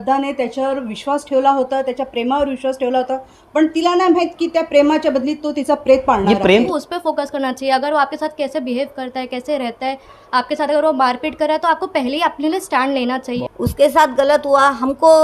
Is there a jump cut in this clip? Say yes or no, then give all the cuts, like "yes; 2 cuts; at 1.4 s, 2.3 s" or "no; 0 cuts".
yes; 2 cuts; at 6.7 s, 13.4 s